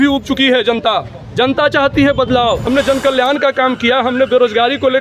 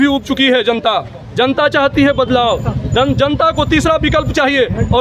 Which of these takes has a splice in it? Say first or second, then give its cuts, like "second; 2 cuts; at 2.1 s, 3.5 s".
first; 1 cut; at 2.6 s